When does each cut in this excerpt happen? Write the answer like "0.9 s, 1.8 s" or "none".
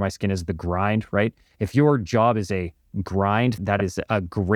3.6 s